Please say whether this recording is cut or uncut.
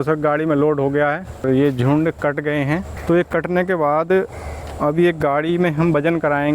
cut